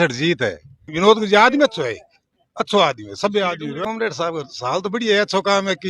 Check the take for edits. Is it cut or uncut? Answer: cut